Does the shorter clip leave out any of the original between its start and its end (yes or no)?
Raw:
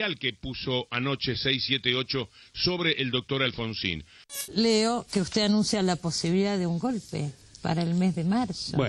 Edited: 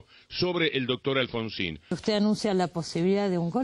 yes